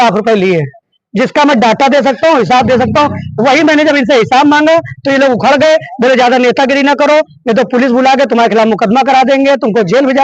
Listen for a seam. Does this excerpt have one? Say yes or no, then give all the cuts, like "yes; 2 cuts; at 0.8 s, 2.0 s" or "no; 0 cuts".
no; 0 cuts